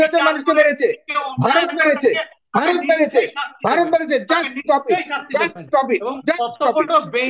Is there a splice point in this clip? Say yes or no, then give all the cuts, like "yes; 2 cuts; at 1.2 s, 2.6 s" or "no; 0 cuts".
no; 0 cuts